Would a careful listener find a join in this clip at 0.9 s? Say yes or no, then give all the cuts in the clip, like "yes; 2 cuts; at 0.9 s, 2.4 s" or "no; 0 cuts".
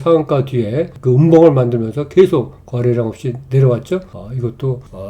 yes; 1 cut; at 0.9 s